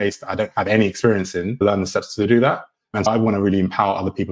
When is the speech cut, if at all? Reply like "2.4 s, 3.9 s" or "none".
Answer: 3.1 s